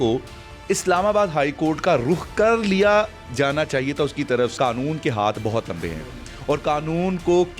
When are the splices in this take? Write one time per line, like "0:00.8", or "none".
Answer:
0:04.5

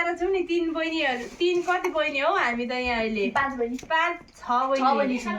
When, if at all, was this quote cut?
none

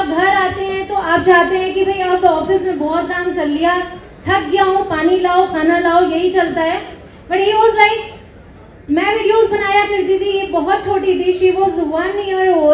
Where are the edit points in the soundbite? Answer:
none

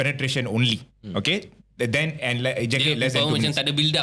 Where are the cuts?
none

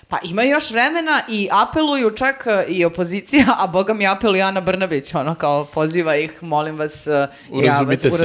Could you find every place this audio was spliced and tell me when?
none

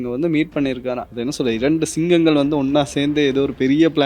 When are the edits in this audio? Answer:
0:01.0

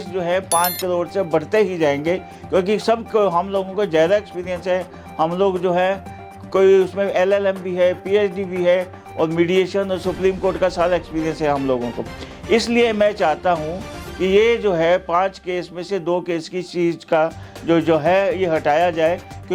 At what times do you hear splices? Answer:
none

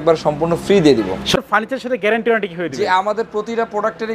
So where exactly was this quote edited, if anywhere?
0:01.2

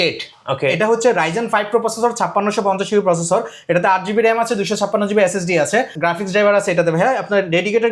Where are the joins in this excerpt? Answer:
0:06.0

